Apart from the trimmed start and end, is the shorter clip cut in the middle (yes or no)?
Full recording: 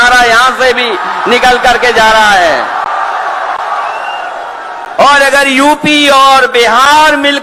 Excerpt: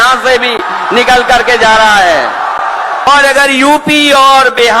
yes